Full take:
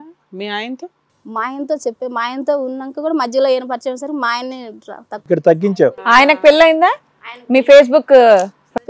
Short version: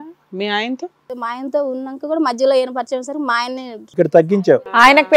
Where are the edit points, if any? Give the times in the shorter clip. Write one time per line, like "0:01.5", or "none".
0:01.1
0:03.7